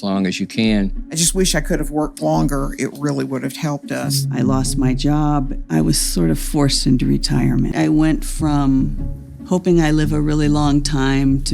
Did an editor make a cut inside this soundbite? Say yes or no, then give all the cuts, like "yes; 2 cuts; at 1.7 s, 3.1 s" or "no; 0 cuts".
no; 0 cuts